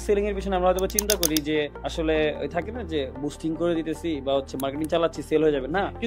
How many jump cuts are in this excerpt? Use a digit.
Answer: 1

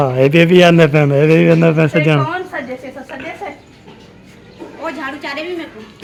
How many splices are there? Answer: 0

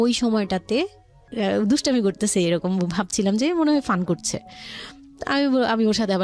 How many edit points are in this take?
1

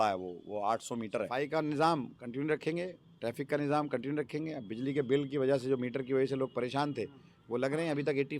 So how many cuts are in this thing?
1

